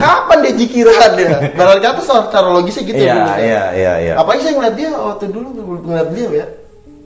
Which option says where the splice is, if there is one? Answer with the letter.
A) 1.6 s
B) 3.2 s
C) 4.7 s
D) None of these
D